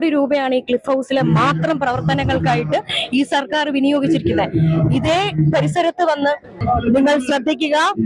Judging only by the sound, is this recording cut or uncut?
cut